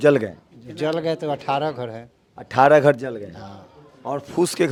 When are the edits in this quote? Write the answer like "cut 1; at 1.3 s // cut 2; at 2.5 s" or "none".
none